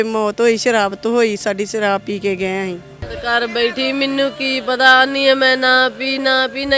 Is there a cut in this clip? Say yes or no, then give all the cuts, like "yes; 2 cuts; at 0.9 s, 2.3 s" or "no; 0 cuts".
yes; 1 cut; at 3.1 s